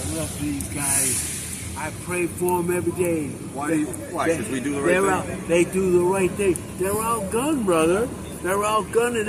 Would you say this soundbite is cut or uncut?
uncut